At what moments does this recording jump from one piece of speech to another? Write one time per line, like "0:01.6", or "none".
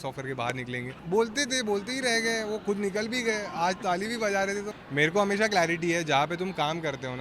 0:01.0
0:04.7

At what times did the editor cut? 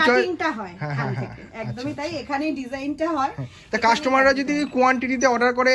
none

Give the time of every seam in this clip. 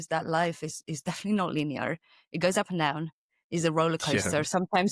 none

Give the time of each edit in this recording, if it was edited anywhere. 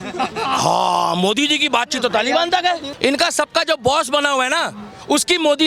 0:02.9

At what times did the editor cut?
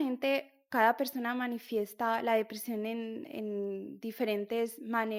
none

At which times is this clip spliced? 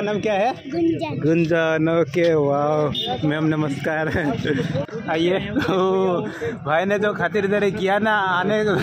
0:04.8

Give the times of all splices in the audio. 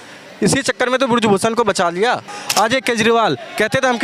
0:02.4

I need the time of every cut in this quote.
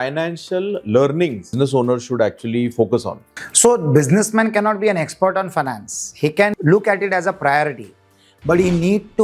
0:01.5
0:06.5

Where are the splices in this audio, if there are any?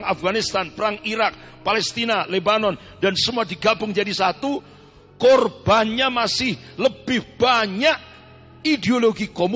none

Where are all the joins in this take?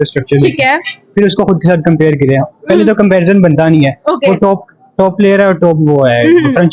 none

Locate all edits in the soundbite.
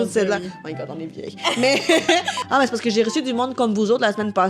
0:02.4

